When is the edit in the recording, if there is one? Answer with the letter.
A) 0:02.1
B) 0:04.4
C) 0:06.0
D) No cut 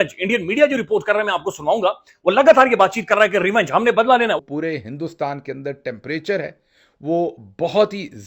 B